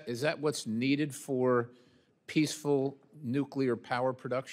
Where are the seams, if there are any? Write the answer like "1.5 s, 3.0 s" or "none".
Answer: 1.5 s